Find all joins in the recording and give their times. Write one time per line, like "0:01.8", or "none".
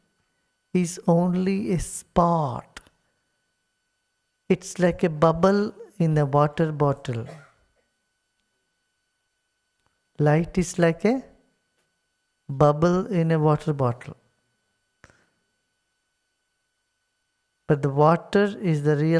none